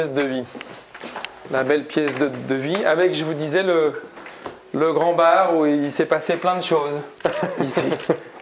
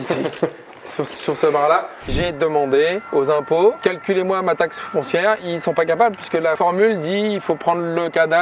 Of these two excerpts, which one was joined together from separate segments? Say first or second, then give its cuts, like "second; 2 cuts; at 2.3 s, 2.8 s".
second; 5 cuts; at 2.1 s, 3.0 s, 3.8 s, 5.4 s, 6.6 s